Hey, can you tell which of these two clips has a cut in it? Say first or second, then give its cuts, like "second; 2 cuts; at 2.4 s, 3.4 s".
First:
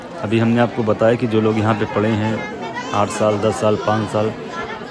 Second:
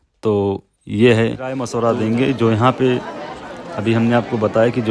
second; 1 cut; at 1.7 s